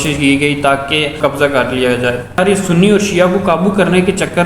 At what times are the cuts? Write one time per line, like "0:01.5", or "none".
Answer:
0:01.2
0:02.4